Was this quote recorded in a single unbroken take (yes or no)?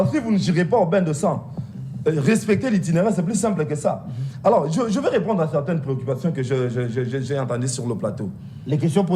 yes